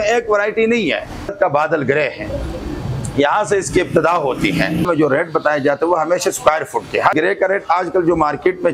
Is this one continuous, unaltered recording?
no; 3 cuts; at 1.3 s, 4.8 s, 7.1 s

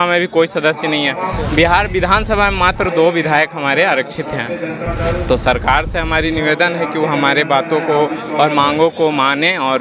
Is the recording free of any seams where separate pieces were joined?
yes; 0 cuts

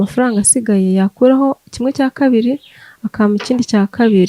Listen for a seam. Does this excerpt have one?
no; 0 cuts

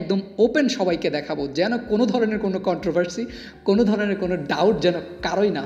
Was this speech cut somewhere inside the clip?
no; 0 cuts

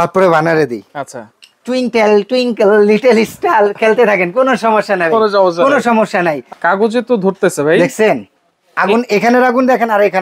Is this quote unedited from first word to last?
no; 1 cut; at 6.4 s

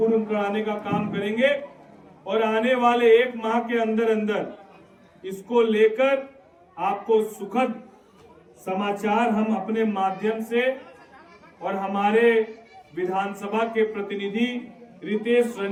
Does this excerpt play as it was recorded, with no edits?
yes; 0 cuts

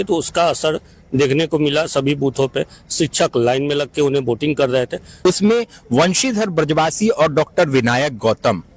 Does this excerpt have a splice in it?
yes; 1 cut; at 5.3 s

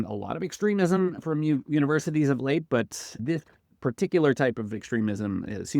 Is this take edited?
yes; 2 cuts; at 1.2 s, 3.2 s

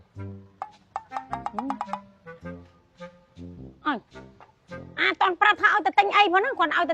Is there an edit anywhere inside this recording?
no; 0 cuts

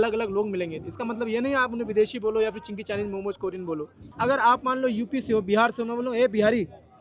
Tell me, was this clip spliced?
no; 0 cuts

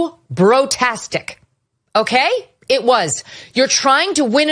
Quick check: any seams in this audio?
no; 0 cuts

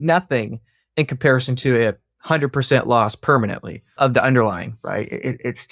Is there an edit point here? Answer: yes; 1 cut; at 3.9 s

